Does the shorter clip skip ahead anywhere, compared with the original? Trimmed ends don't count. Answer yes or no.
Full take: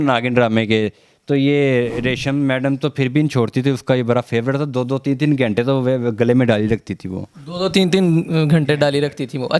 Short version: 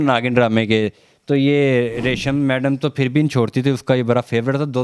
no